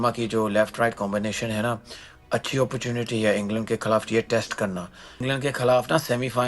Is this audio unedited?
no; 1 cut; at 5.1 s

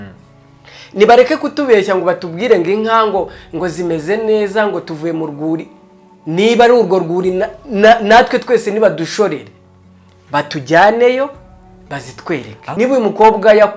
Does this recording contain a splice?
yes; 1 cut; at 12.8 s

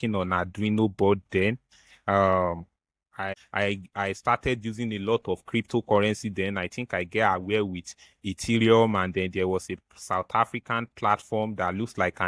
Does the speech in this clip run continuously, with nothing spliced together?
no; 1 cut; at 3.2 s

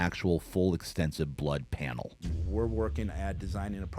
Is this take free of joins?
no; 1 cut; at 2.4 s

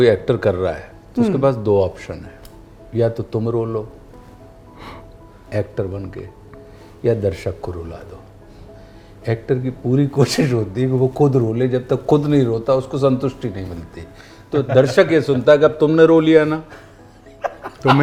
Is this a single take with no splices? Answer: yes; 0 cuts

